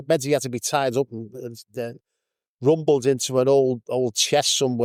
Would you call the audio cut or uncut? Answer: uncut